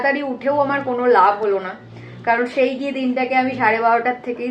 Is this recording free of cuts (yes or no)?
yes